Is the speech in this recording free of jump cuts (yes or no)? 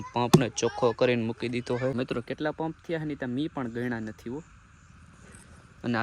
no